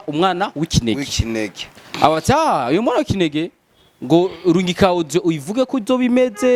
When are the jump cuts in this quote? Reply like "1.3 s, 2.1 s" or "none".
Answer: none